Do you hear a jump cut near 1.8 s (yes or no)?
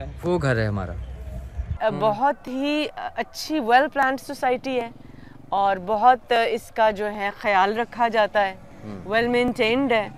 yes